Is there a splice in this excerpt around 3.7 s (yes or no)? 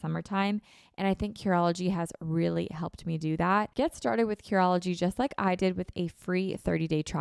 yes